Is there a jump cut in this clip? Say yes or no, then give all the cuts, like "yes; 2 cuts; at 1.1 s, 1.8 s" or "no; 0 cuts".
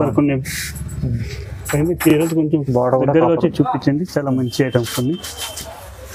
no; 0 cuts